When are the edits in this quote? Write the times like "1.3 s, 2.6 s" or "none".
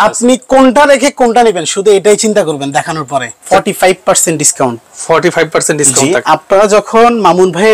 3.4 s